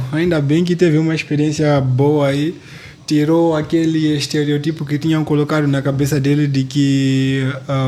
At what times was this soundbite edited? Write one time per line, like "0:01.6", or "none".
none